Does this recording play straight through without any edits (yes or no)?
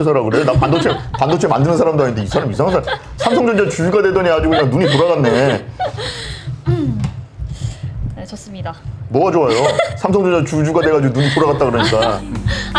yes